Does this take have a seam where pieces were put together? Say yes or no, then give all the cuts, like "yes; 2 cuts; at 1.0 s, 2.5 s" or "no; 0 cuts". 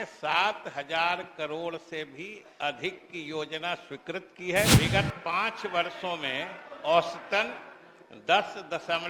yes; 1 cut; at 4.7 s